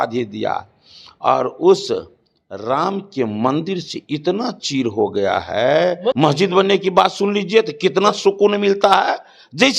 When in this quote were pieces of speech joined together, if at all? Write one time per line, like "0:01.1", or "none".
0:06.1